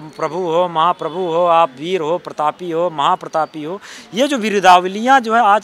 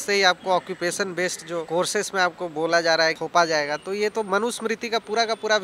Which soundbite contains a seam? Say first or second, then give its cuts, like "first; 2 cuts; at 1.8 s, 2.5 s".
second; 2 cuts; at 1.7 s, 3.2 s